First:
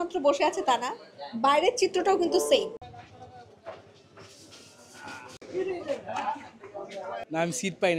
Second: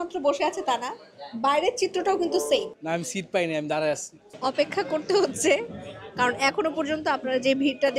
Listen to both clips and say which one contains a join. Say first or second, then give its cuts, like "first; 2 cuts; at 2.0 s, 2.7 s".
second; 2 cuts; at 2.8 s, 4.1 s